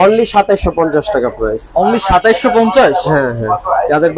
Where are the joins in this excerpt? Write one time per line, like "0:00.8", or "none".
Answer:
none